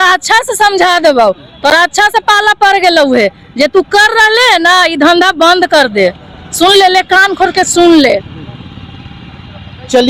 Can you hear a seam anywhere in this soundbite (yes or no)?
no